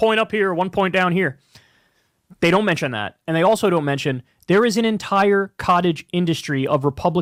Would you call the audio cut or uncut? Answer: uncut